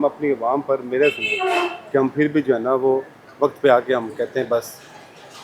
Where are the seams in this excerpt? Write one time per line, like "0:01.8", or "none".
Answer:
none